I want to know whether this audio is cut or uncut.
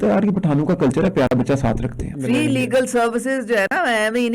cut